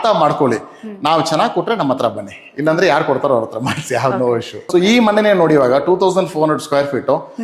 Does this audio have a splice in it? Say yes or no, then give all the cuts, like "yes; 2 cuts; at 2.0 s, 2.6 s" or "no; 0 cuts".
yes; 1 cut; at 4.6 s